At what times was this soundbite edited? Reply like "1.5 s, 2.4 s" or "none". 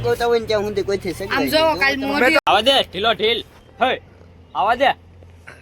2.4 s